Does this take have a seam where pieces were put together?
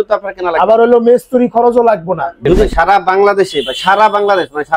yes; 1 cut; at 2.7 s

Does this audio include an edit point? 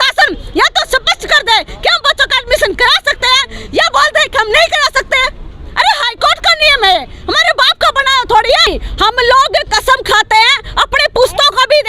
yes; 1 cut; at 8.7 s

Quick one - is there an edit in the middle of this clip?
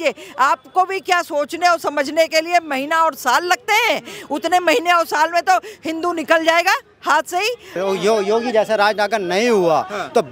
yes; 1 cut; at 7.7 s

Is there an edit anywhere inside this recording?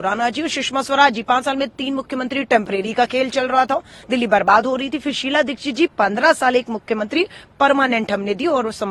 no; 0 cuts

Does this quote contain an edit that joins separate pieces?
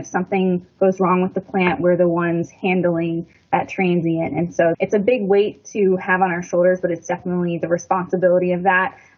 no; 0 cuts

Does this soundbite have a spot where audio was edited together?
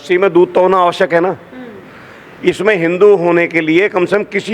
no; 0 cuts

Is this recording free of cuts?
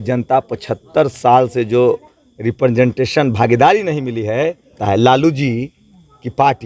no; 1 cut; at 4.8 s

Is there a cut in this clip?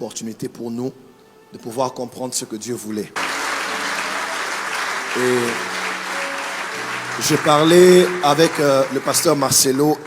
yes; 1 cut; at 3.2 s

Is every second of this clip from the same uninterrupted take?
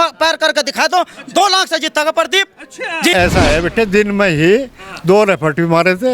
no; 1 cut; at 3.1 s

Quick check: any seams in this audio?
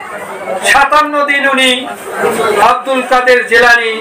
yes; 1 cut; at 2.1 s

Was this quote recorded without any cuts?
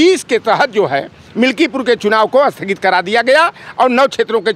yes; 0 cuts

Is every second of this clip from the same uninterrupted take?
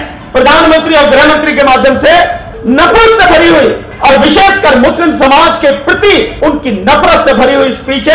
no; 3 cuts; at 2.5 s, 3.9 s, 6.3 s

